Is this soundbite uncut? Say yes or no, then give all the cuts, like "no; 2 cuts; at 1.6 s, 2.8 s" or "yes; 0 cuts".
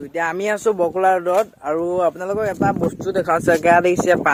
yes; 0 cuts